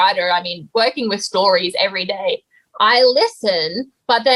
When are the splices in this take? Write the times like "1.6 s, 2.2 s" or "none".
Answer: none